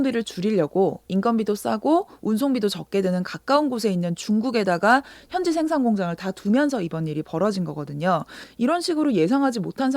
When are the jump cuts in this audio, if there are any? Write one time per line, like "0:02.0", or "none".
0:08.4